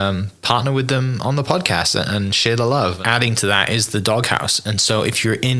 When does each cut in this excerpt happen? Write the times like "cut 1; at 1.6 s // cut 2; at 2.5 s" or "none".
cut 1; at 3.0 s